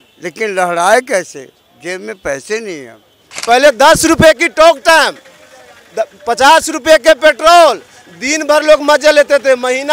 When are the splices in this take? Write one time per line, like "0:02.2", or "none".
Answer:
0:03.3